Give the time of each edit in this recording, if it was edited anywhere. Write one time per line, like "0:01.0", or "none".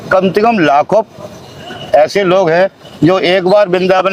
none